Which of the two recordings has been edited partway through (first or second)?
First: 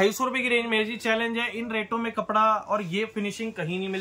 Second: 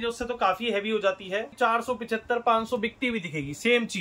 second